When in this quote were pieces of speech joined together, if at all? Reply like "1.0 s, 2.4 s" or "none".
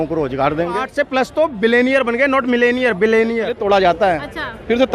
0.9 s, 3.5 s